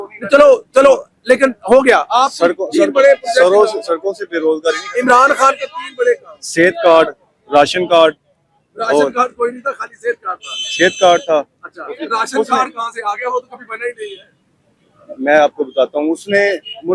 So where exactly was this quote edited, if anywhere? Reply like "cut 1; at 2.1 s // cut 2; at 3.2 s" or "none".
none